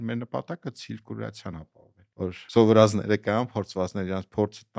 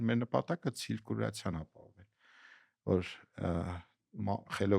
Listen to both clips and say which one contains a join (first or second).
first